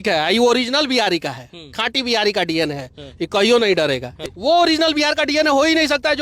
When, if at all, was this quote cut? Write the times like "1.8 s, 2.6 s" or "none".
4.1 s